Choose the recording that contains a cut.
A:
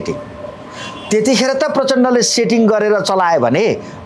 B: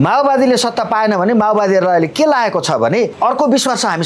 B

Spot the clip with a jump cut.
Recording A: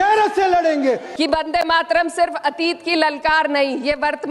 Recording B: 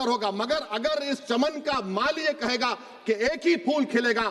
A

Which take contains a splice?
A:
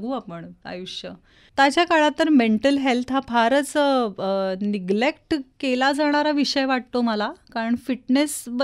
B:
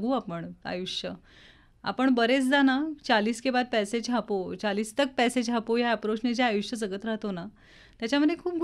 A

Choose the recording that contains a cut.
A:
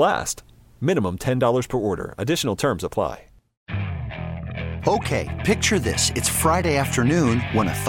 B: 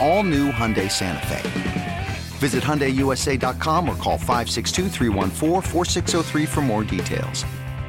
A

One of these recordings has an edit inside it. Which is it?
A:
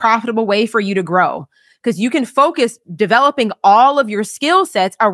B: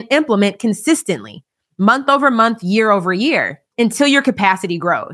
B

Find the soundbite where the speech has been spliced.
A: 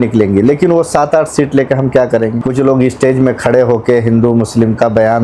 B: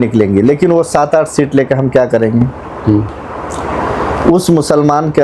A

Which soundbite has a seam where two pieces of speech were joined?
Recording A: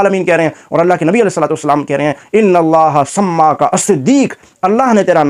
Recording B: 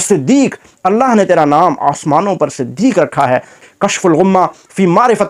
B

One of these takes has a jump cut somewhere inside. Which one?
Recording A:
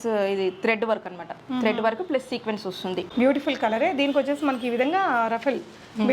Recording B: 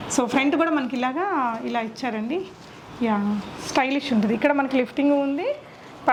A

